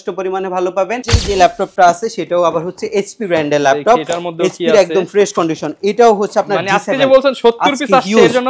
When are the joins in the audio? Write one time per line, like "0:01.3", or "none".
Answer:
0:01.1

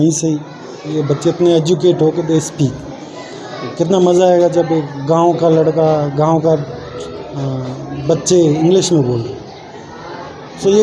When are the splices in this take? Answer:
0:00.9

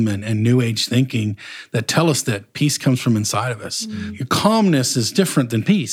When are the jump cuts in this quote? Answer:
0:04.1

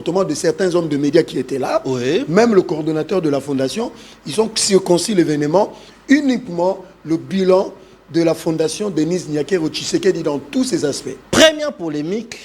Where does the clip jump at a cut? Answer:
0:11.1

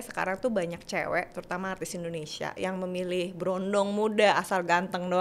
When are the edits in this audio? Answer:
none

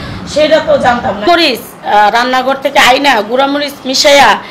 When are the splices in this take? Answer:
0:01.2

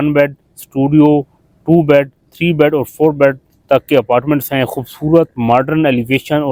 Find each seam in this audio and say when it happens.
none

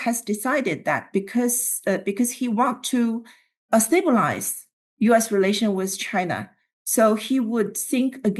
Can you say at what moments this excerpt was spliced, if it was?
none

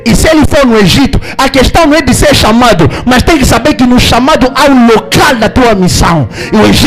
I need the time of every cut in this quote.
none

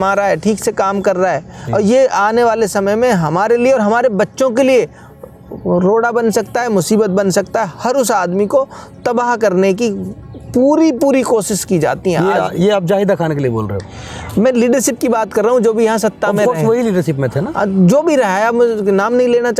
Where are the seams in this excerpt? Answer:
none

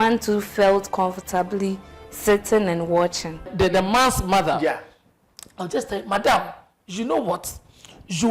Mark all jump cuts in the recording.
0:03.5

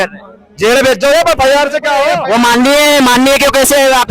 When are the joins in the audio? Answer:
0:02.1

